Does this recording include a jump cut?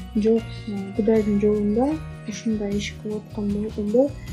no; 0 cuts

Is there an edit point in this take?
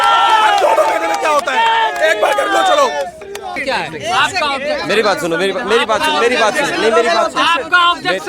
yes; 1 cut; at 3.6 s

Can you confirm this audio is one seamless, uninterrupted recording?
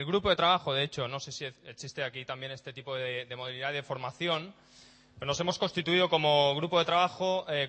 no; 1 cut; at 4.5 s

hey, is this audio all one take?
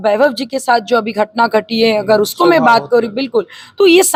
yes; 0 cuts

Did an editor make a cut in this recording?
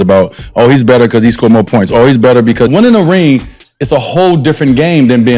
yes; 1 cut; at 2.7 s

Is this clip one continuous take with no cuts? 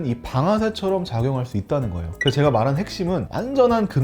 yes; 0 cuts

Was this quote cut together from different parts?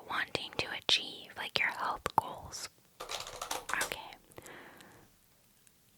yes; 1 cut; at 3.0 s

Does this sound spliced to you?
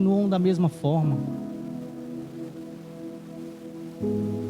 no; 0 cuts

